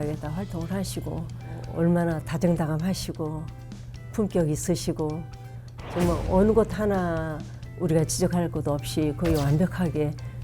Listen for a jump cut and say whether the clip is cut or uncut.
cut